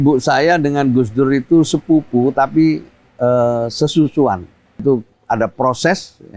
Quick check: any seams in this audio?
yes; 1 cut; at 4.8 s

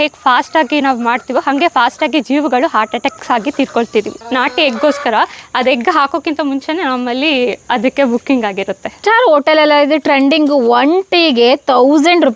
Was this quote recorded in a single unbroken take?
no; 2 cuts; at 4.2 s, 8.9 s

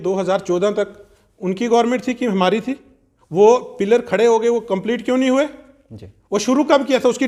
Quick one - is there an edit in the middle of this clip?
no; 0 cuts

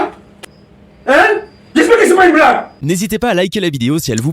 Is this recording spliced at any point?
yes; 1 cut; at 2.7 s

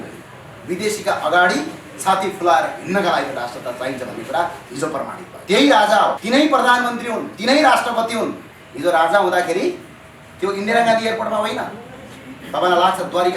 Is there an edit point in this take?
yes; 2 cuts; at 5.3 s, 6.2 s

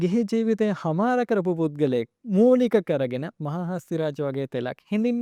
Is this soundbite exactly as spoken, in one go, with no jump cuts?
yes; 0 cuts

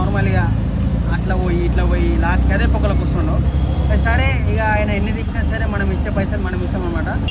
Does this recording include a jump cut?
no; 0 cuts

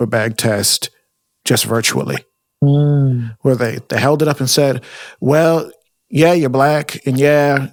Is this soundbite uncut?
yes; 0 cuts

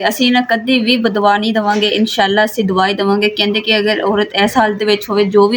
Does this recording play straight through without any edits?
yes; 0 cuts

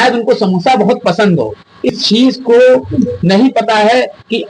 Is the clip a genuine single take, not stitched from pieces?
no; 1 cut; at 1.9 s

